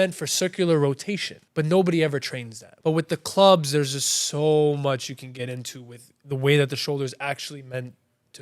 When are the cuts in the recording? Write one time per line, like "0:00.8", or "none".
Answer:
0:01.3
0:02.7